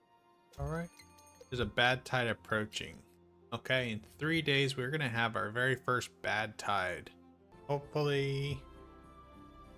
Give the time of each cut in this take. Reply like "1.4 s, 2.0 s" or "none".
7.5 s